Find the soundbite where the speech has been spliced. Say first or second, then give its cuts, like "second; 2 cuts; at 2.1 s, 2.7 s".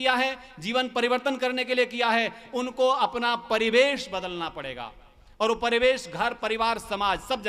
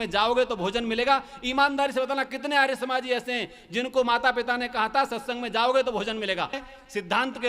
second; 1 cut; at 6.6 s